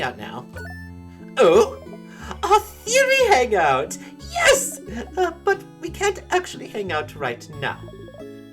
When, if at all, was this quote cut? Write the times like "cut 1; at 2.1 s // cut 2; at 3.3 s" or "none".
none